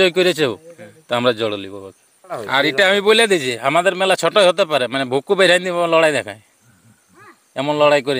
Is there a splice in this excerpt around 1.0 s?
no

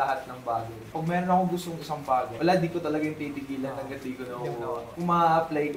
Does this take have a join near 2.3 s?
yes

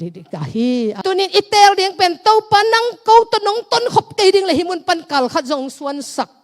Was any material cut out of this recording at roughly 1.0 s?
yes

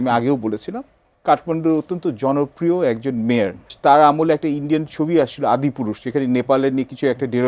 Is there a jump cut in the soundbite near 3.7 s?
yes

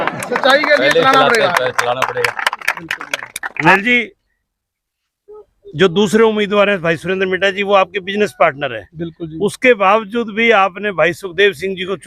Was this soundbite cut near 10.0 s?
no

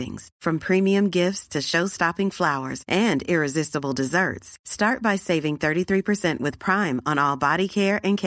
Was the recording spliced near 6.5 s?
no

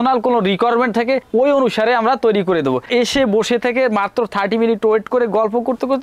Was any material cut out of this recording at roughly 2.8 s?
yes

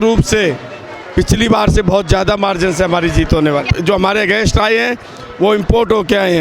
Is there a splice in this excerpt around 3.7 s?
yes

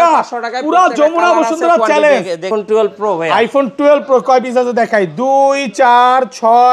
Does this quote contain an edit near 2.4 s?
yes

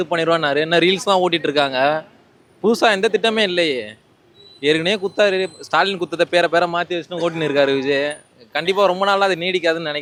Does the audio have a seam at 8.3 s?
no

